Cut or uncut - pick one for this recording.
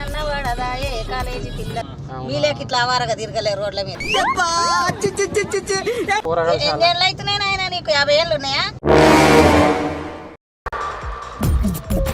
cut